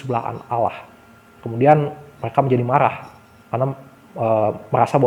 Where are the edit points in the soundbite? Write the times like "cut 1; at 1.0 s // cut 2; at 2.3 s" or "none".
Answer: none